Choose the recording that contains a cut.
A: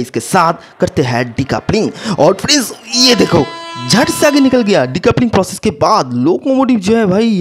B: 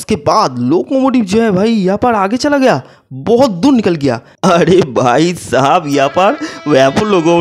B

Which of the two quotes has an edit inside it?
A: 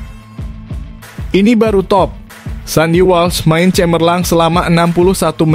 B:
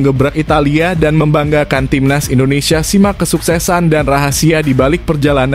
A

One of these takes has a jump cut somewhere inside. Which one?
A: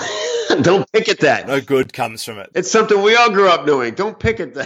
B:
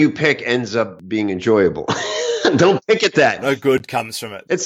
B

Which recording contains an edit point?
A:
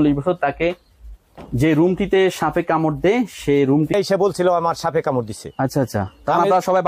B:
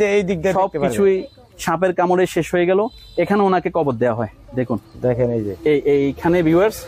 A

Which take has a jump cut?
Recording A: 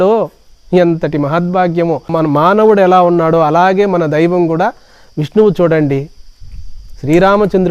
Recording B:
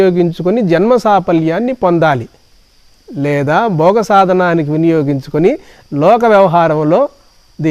A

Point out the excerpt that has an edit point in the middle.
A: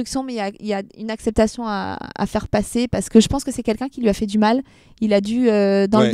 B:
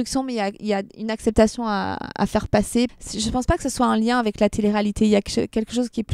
B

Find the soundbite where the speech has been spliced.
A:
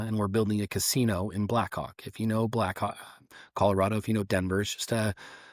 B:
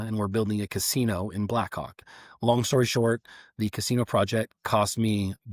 B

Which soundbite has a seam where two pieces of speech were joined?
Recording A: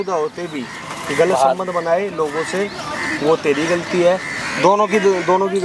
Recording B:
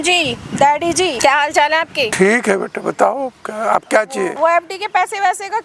B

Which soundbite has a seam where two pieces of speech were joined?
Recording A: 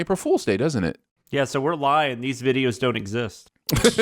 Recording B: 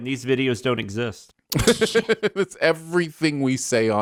A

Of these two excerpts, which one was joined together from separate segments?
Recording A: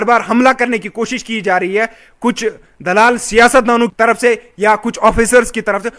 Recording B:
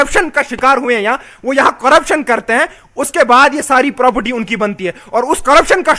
A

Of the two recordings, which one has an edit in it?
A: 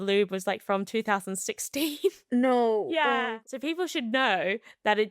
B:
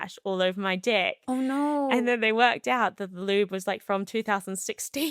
A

